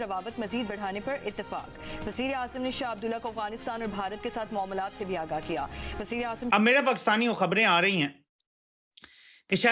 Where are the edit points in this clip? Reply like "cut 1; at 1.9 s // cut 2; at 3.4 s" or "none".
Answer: cut 1; at 6.4 s